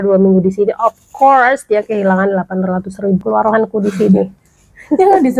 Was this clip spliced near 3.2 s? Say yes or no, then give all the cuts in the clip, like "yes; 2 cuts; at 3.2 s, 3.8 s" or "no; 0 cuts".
yes; 1 cut; at 3.2 s